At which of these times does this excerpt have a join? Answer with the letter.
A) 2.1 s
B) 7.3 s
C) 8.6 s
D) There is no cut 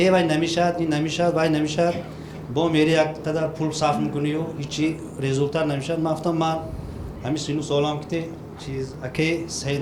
D